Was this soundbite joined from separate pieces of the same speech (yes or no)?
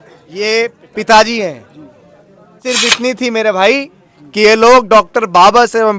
yes